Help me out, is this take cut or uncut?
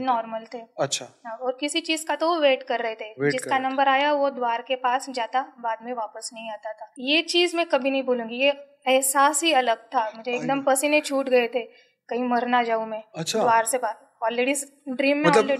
cut